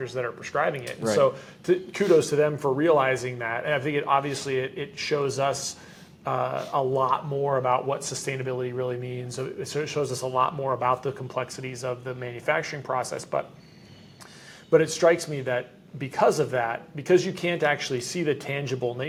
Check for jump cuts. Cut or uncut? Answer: uncut